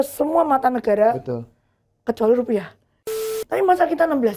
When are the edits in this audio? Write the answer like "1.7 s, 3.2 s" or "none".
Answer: 3.1 s